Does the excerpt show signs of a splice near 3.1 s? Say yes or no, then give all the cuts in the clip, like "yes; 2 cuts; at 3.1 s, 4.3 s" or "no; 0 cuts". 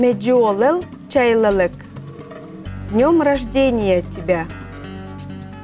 no; 1 cut; at 4.5 s